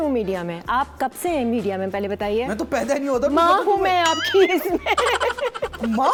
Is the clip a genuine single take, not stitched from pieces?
yes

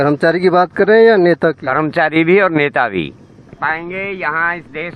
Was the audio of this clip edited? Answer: yes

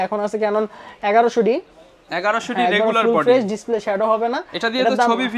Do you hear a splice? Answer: no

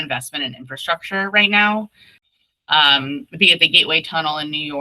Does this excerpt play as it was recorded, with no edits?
no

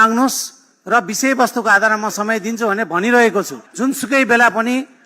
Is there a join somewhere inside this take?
yes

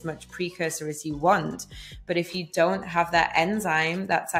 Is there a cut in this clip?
no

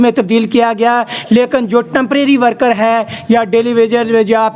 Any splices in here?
no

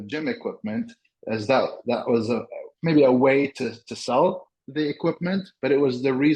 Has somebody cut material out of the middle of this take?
no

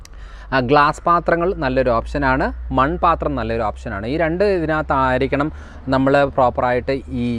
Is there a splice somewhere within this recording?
no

